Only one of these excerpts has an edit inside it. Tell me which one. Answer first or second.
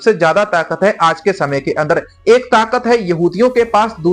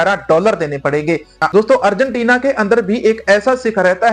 second